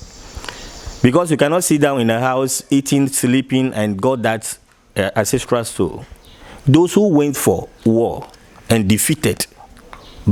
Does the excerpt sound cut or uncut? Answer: uncut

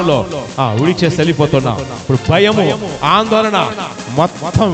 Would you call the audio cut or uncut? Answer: uncut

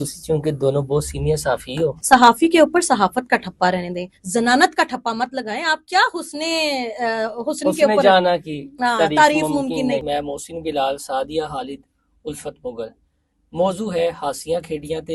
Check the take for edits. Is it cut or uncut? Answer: cut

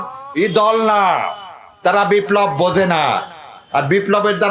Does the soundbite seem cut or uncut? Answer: uncut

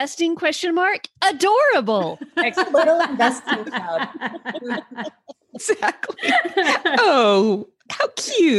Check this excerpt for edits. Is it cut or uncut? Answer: uncut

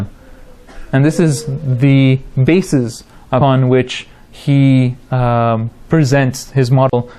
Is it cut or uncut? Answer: cut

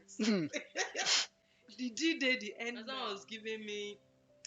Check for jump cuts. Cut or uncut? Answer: cut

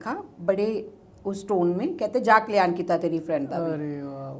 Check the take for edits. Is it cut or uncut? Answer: uncut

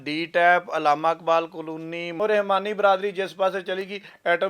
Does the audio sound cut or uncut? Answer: cut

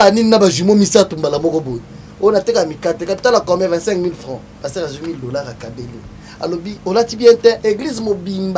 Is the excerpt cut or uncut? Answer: cut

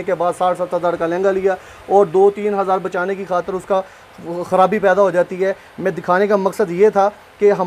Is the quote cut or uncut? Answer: uncut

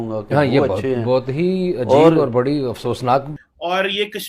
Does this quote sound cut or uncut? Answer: cut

